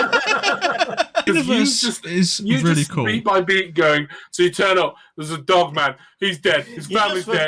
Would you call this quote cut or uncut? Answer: cut